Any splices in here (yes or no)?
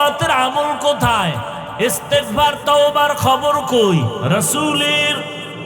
yes